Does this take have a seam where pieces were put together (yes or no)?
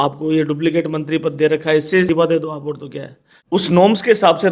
yes